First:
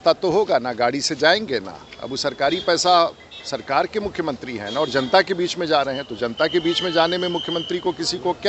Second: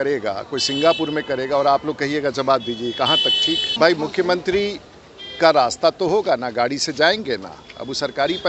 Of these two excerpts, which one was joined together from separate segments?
second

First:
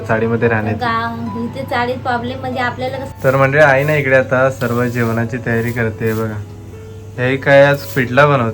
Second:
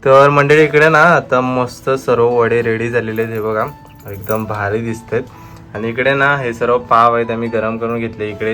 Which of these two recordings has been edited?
first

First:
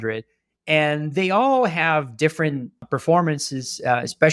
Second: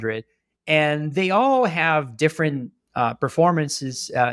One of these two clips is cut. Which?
first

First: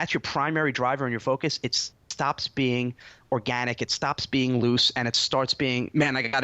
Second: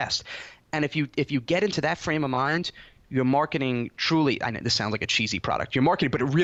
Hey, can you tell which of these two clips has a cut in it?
first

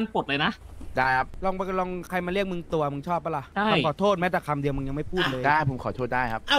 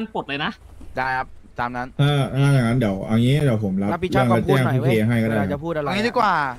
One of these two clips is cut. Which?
first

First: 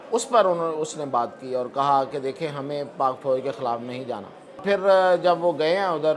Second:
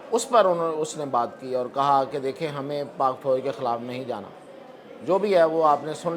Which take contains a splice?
first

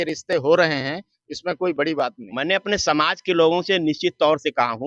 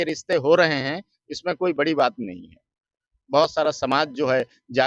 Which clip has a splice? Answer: first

